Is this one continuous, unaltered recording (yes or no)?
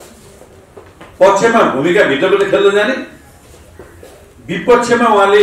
yes